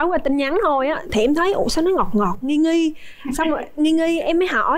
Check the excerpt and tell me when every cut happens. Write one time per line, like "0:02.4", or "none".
none